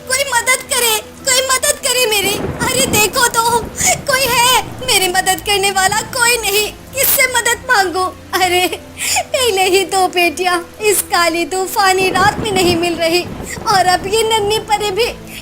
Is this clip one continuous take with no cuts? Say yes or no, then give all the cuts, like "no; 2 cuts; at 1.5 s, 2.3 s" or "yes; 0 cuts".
no; 1 cut; at 2.5 s